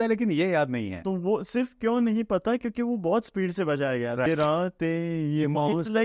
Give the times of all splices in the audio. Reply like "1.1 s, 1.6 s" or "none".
4.3 s